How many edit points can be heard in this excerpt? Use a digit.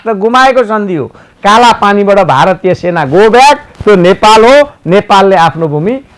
1